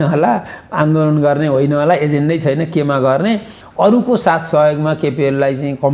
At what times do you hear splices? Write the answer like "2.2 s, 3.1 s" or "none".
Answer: 3.6 s